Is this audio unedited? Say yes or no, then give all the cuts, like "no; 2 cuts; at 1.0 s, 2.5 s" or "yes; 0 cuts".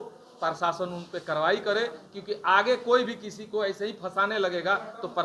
yes; 0 cuts